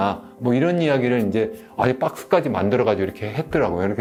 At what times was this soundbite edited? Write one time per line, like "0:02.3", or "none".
none